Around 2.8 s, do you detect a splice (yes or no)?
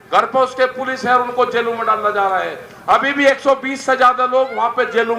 no